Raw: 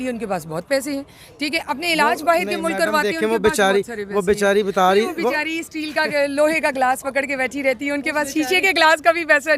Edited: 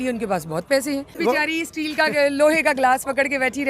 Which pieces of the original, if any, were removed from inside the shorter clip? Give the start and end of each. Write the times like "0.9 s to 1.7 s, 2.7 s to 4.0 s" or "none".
1.2 s to 5.1 s